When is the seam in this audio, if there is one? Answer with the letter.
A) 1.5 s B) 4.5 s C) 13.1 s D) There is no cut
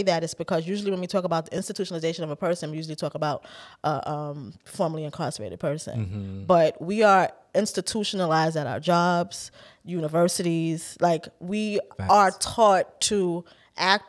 A